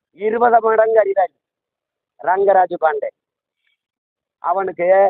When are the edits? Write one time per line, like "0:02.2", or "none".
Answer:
none

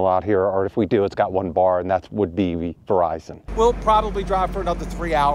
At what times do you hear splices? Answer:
0:03.5

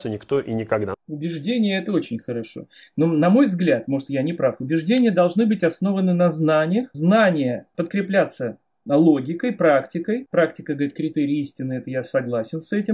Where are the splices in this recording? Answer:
0:06.9
0:07.7
0:10.3

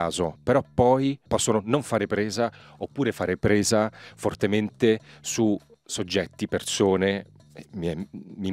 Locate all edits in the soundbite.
0:01.3

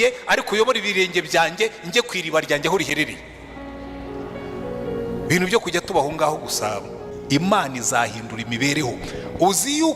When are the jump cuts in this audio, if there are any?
0:07.1

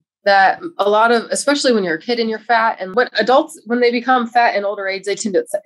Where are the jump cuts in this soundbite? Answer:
0:02.9

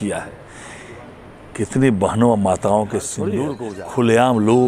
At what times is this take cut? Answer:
0:03.4

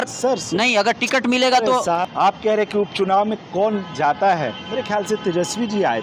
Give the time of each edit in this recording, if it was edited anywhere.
0:02.0

